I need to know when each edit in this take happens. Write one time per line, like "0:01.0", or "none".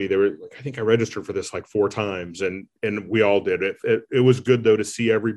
none